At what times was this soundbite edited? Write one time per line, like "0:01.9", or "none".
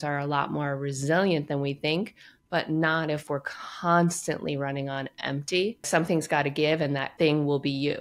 0:05.9
0:07.1